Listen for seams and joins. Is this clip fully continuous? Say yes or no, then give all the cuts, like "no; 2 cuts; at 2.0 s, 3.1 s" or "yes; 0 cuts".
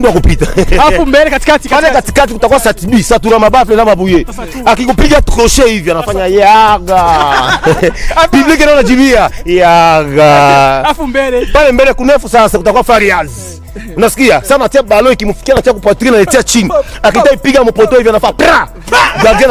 yes; 0 cuts